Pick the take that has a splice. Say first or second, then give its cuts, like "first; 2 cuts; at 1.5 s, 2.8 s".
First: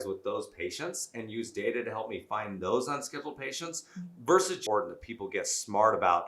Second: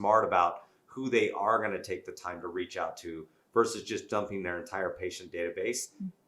first; 1 cut; at 4.6 s